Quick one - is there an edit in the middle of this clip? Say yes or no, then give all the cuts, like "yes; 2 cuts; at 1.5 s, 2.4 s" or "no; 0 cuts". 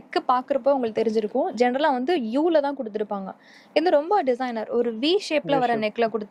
no; 0 cuts